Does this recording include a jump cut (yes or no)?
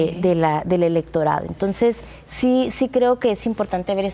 no